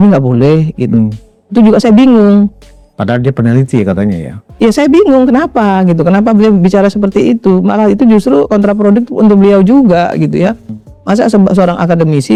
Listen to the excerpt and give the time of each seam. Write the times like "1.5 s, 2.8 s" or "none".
none